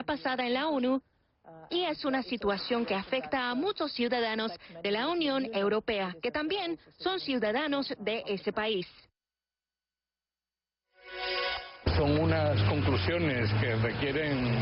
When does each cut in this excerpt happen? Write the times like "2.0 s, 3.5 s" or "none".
2.0 s